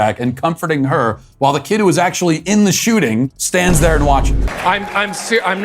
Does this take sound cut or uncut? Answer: cut